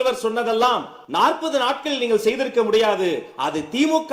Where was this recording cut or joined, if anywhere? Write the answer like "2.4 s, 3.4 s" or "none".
1.0 s

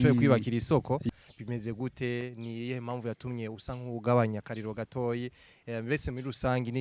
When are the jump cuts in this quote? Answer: 1.1 s

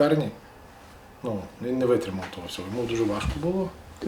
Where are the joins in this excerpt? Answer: none

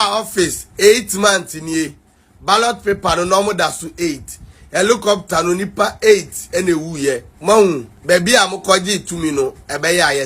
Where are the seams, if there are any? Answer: 7.3 s, 7.9 s

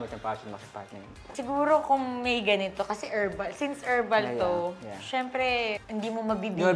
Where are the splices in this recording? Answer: 1.3 s

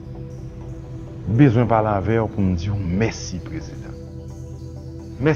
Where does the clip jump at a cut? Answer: 1.2 s

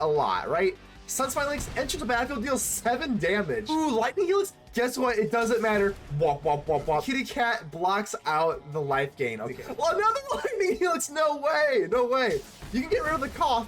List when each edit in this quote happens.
3.6 s, 7.1 s, 9.6 s

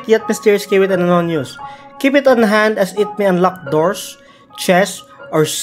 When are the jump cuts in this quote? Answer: none

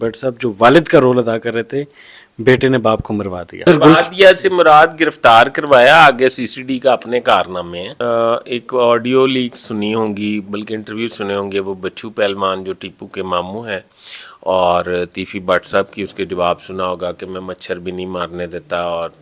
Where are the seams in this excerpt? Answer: 3.6 s, 7.9 s

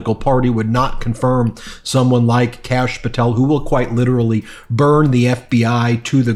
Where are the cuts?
none

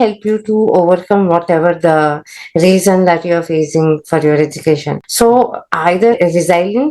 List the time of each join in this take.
5.0 s

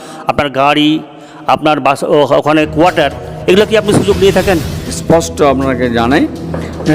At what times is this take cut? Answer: 5.0 s

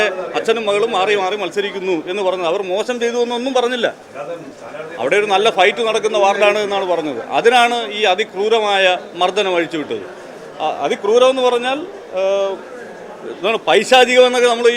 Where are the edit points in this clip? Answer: none

